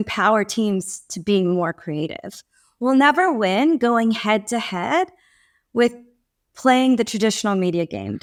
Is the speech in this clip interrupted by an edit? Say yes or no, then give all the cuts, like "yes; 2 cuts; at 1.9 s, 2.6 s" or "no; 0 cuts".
no; 0 cuts